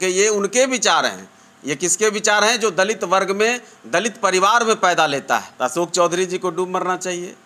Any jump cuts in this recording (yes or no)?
yes